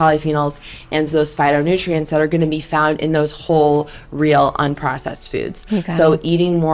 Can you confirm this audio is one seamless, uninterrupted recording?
yes; 0 cuts

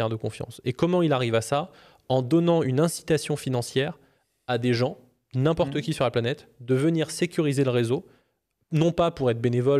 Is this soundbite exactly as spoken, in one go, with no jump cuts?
yes; 0 cuts

